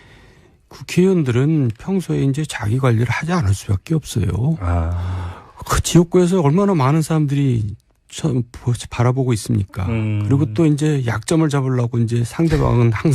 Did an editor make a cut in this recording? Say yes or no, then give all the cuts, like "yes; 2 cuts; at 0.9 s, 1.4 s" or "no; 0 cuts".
yes; 1 cut; at 1.8 s